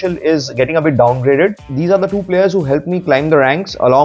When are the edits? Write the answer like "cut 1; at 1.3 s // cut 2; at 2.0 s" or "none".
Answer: cut 1; at 1.7 s

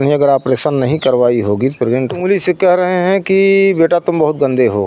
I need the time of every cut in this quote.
cut 1; at 2.1 s

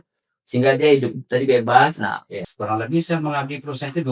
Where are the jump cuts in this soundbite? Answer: cut 1; at 2.4 s

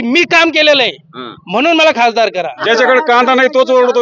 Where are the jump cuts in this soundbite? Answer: cut 1; at 2.6 s

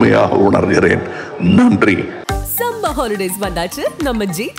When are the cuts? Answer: cut 1; at 2.3 s

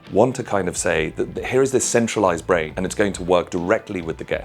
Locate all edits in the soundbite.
cut 1; at 2.8 s

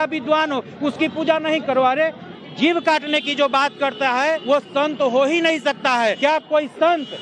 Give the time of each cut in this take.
cut 1; at 2.3 s // cut 2; at 4.4 s // cut 3; at 6.2 s

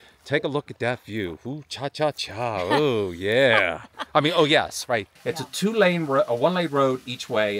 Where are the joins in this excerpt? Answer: cut 1; at 5.1 s

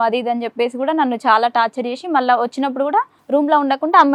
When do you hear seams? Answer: none

